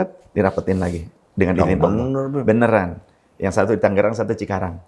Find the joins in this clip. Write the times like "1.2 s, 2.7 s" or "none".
none